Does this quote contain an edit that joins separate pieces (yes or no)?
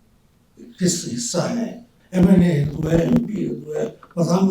yes